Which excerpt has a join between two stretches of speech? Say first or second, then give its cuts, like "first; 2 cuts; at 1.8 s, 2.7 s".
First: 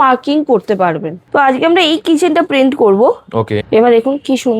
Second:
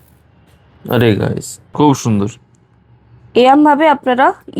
first; 2 cuts; at 1.1 s, 3.6 s